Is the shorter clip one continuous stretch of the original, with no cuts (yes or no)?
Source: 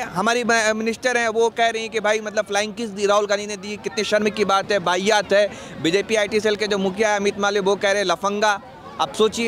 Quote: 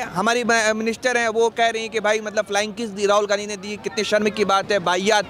yes